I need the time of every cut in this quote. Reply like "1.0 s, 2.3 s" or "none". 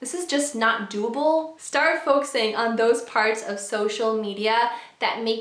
1.5 s